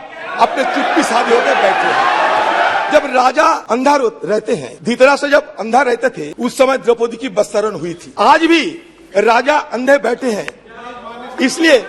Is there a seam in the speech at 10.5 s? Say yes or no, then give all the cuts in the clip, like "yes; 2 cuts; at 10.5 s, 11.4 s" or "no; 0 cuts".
no; 5 cuts; at 2.8 s, 3.6 s, 4.7 s, 6.3 s, 8.0 s